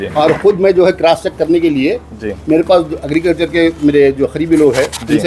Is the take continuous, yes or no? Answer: yes